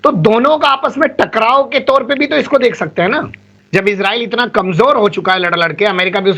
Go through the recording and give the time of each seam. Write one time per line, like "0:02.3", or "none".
0:03.4